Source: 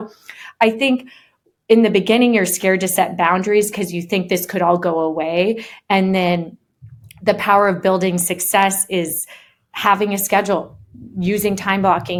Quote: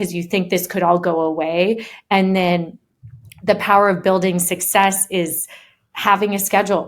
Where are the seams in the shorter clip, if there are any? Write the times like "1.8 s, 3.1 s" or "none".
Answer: none

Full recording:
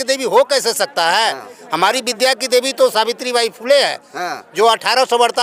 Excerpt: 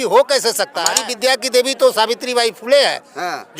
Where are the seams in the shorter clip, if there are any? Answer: 1.0 s

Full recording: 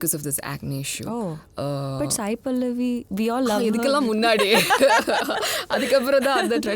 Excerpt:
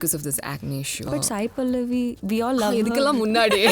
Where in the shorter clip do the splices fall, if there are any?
1.1 s

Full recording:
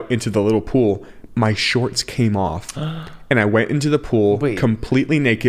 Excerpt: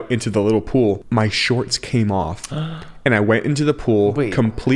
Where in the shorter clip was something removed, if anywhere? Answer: 1.0 s

